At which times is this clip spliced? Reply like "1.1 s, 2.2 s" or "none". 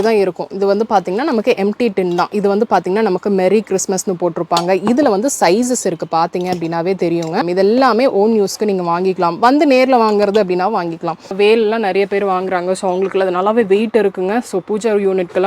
7.5 s, 11.3 s